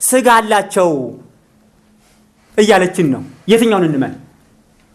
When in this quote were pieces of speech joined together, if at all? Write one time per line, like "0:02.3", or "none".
none